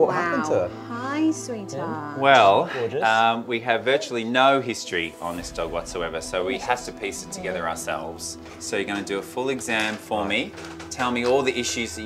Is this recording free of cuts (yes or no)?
yes